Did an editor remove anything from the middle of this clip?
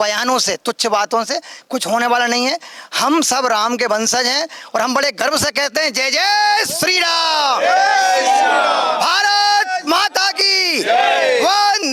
no; 0 cuts

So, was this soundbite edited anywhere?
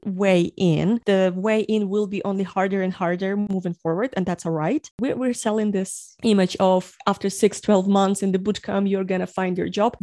no; 0 cuts

